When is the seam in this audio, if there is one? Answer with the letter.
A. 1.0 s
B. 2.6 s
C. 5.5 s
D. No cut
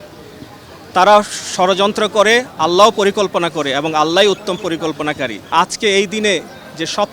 C